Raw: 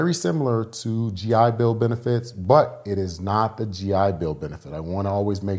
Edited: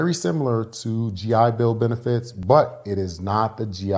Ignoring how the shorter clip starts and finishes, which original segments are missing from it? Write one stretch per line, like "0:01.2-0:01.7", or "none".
none